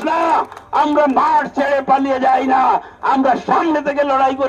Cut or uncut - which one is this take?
uncut